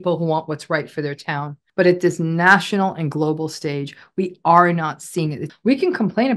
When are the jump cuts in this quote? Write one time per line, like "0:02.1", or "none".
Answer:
0:01.6
0:05.5